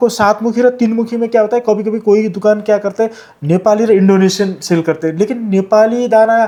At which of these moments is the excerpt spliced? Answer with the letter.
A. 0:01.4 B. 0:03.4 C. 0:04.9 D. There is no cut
D